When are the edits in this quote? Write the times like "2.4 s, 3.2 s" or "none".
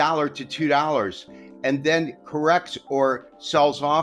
none